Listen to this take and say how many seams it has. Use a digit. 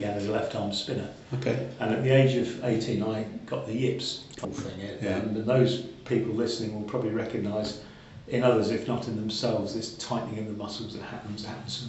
1